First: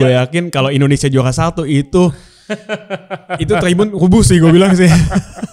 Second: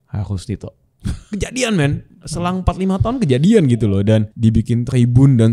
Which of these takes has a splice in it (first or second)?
second